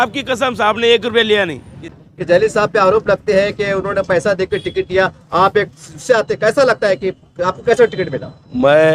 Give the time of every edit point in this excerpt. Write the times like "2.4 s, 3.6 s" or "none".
1.9 s

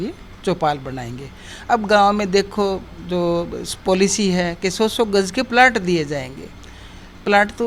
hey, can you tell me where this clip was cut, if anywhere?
none

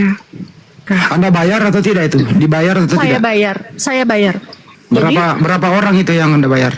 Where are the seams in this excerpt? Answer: 0.8 s, 4.7 s

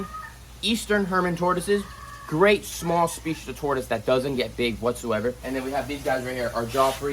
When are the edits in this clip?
5.5 s

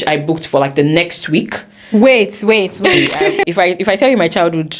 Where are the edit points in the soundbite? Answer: 3.4 s

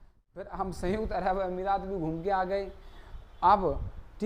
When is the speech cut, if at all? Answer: none

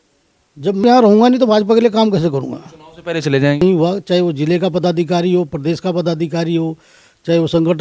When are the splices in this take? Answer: 0.8 s, 3.6 s

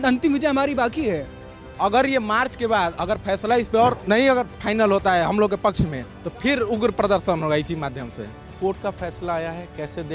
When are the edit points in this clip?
1.5 s, 4.0 s, 8.4 s

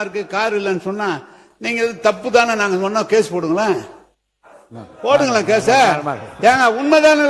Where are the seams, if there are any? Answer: none

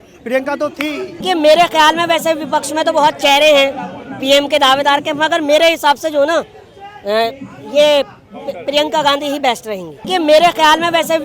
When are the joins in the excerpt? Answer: 1.2 s, 10.1 s

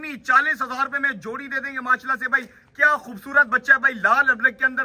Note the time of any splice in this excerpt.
none

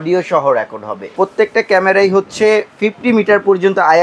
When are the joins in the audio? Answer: 1.1 s

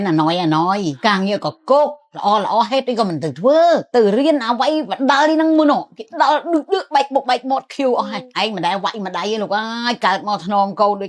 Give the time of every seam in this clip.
0.9 s, 3.9 s, 8.2 s

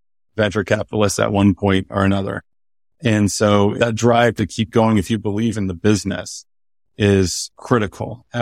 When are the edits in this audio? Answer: 3.8 s, 7.5 s

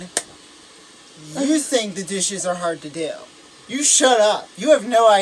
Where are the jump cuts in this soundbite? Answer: none

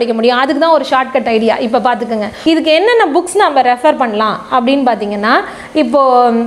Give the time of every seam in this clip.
2.3 s

